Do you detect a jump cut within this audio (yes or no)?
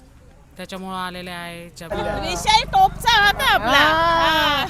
yes